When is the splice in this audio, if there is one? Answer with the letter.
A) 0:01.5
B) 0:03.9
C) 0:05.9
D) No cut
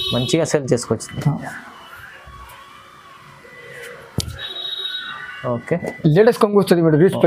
C